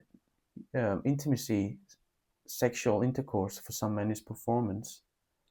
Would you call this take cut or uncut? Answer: uncut